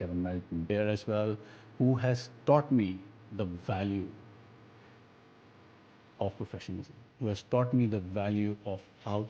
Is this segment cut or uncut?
uncut